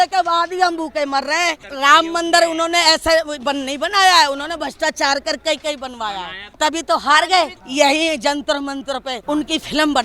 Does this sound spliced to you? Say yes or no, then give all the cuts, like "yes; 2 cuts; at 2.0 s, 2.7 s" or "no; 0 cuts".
yes; 4 cuts; at 1.7 s, 6.4 s, 7.6 s, 9.1 s